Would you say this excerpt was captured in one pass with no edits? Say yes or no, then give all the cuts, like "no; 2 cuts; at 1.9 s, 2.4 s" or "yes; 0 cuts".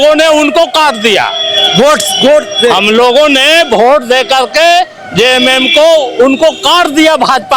yes; 0 cuts